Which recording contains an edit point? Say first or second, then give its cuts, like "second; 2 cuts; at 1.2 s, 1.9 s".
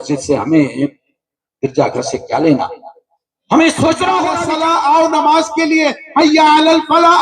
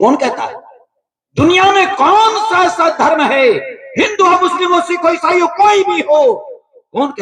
first; 1 cut; at 4.4 s